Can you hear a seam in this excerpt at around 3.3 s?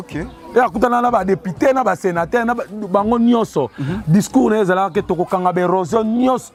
no; 0 cuts

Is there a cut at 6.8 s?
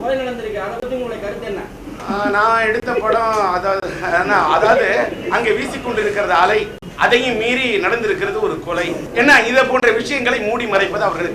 yes; 3 cuts; at 1.8 s, 6.8 s, 9.0 s

